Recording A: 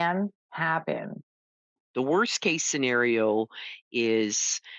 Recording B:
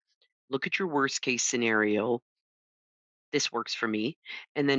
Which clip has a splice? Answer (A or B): A